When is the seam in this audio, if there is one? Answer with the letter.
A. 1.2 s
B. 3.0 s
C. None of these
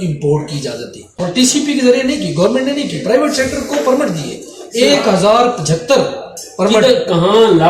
A